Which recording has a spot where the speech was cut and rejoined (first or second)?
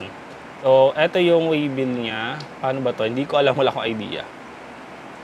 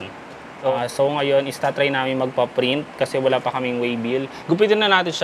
second